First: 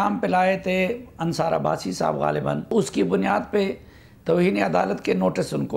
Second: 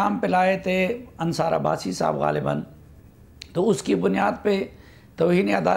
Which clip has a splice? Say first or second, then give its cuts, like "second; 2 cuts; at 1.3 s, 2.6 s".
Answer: first; 1 cut; at 2.7 s